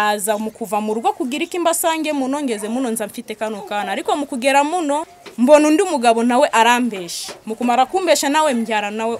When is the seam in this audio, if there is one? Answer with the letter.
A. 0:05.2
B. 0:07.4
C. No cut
A